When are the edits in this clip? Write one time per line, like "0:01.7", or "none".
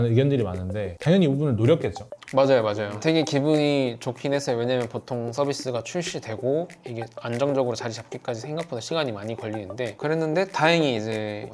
0:00.9
0:02.9
0:09.9